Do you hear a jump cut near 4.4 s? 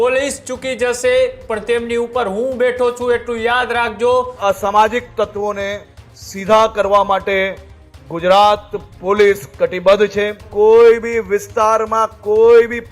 yes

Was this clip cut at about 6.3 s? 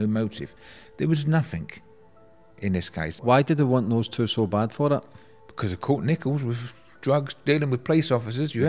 no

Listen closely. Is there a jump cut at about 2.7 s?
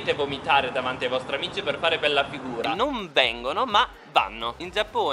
yes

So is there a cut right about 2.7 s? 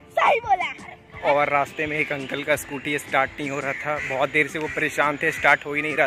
no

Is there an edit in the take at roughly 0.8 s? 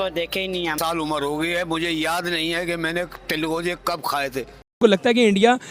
yes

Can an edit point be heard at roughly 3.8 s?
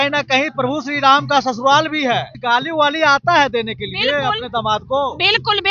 no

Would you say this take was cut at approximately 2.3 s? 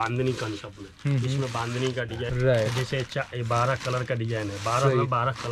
yes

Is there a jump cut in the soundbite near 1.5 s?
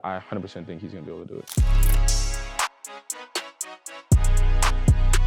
yes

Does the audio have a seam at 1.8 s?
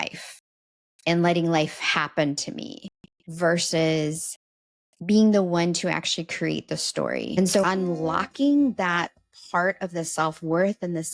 no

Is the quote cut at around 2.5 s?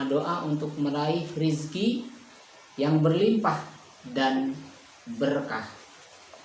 no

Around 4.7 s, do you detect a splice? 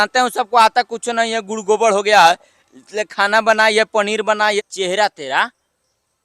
yes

